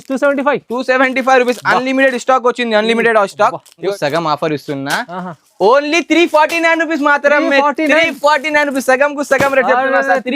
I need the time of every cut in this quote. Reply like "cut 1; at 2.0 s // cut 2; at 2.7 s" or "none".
cut 1; at 3.8 s